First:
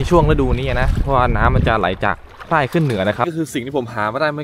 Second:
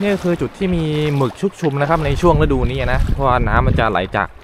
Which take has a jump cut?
first; 1 cut; at 3.2 s

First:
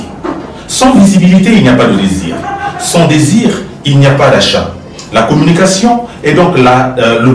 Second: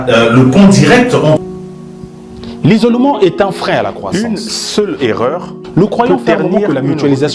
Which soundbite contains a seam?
second; 1 cut; at 1.4 s

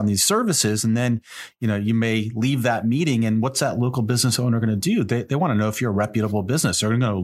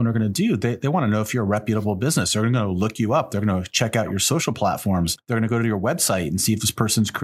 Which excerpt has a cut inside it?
second; 1 cut; at 5.2 s

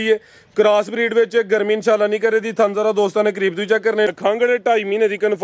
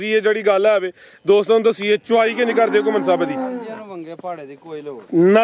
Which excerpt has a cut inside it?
first; 1 cut; at 4.1 s

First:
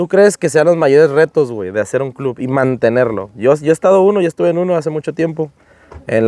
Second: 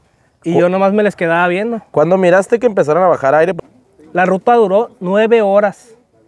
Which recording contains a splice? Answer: second; 1 cut; at 3.6 s

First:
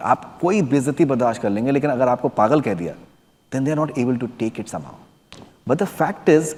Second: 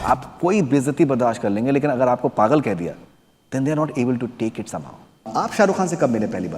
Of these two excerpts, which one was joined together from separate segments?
second; 1 cut; at 5.3 s

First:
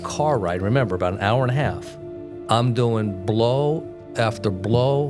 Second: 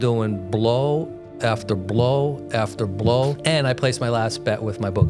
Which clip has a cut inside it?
second; 1 cut; at 3.4 s

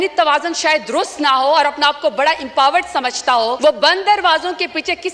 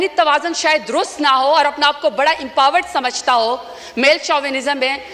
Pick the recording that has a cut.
first; 1 cut; at 3.6 s

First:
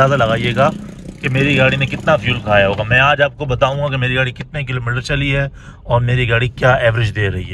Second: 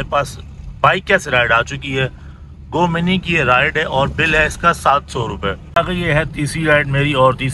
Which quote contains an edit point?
second; 1 cut; at 5.8 s

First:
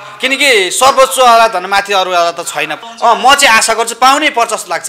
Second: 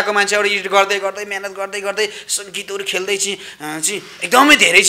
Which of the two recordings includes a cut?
first; 1 cut; at 2.8 s

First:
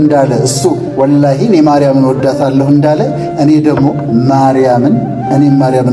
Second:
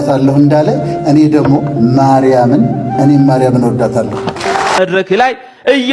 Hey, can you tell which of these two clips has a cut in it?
second; 1 cut; at 4.8 s

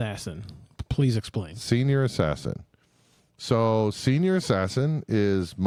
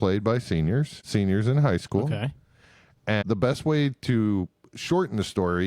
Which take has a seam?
second; 2 cuts; at 1.0 s, 3.2 s

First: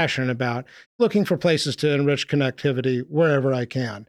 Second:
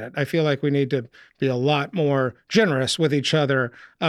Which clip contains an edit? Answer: first; 1 cut; at 0.9 s

